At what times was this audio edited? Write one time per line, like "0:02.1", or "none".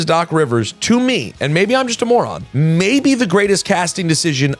none